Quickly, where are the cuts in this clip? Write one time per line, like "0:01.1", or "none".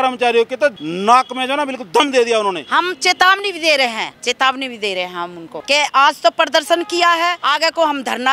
0:00.9
0:02.6
0:04.1
0:05.5
0:07.4